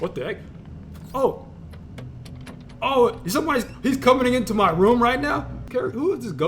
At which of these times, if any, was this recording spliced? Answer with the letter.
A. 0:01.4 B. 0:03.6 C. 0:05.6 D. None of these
C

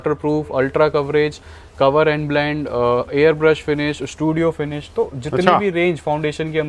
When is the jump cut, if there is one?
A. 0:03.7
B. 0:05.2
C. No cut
C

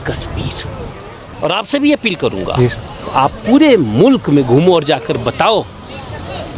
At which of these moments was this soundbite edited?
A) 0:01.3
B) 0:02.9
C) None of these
A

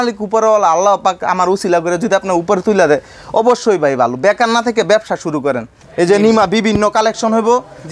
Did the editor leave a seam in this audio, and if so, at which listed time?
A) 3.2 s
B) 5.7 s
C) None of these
B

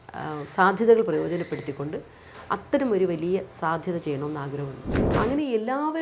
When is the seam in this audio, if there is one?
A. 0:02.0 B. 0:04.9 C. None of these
B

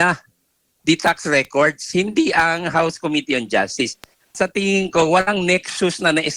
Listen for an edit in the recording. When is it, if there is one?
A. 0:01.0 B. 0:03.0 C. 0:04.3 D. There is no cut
C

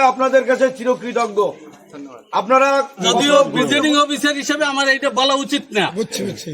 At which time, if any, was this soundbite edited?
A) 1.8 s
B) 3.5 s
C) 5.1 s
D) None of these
B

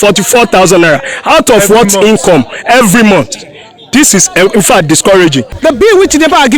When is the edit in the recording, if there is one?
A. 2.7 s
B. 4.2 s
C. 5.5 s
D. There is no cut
C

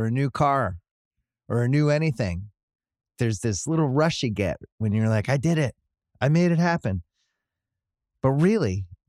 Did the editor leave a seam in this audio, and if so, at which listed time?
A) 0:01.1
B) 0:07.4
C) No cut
C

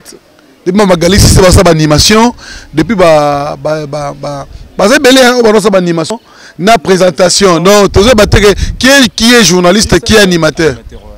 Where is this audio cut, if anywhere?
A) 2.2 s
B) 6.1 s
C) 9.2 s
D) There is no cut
B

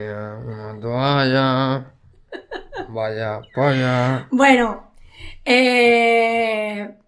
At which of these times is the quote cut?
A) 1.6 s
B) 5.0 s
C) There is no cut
C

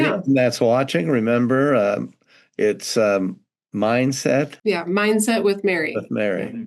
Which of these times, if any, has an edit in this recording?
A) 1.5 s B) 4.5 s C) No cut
B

